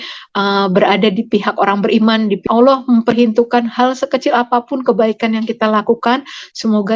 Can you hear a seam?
yes; 1 cut; at 2.4 s

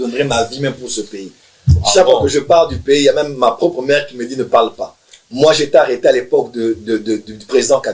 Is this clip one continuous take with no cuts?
yes; 0 cuts

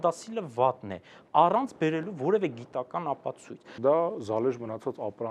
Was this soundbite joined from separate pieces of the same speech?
yes; 1 cut; at 3.8 s

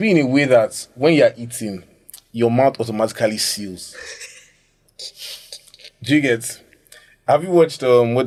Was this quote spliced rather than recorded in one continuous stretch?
no; 0 cuts

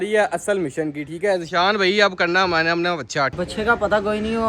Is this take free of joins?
no; 1 cut; at 3.3 s

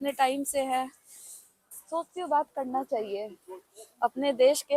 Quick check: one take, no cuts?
yes; 0 cuts

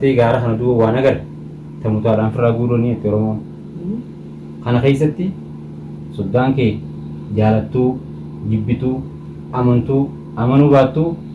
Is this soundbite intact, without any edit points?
yes; 0 cuts

